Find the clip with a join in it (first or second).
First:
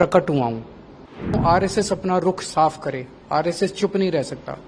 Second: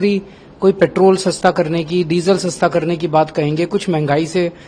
first